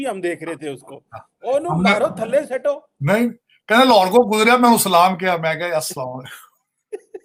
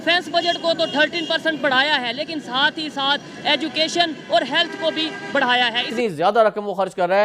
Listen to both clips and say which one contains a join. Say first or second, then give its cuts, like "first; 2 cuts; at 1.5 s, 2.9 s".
second; 1 cut; at 5.9 s